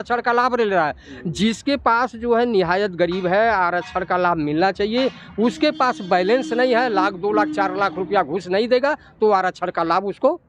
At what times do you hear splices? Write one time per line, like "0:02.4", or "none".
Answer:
none